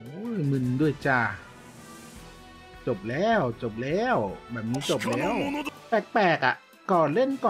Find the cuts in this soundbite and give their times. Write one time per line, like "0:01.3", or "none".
0:05.7